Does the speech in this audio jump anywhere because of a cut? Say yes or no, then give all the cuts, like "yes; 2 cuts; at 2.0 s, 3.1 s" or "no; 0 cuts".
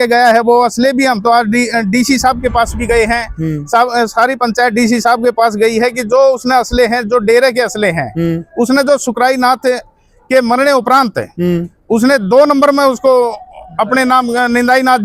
no; 0 cuts